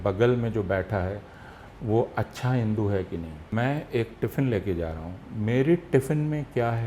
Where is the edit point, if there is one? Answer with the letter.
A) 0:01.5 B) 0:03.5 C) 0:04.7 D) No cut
B